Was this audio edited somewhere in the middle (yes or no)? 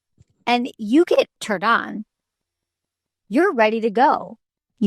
yes